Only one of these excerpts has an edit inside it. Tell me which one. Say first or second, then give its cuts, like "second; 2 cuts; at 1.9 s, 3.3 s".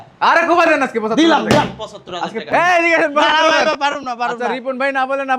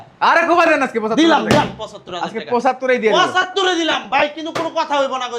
first; 1 cut; at 2.4 s